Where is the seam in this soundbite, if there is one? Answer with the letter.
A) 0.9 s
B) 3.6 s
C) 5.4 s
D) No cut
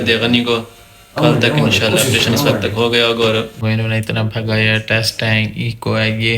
B